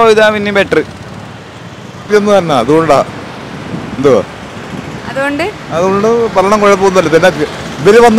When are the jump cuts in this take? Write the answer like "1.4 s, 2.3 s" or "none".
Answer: none